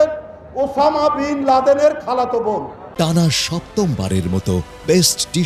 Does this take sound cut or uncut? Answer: uncut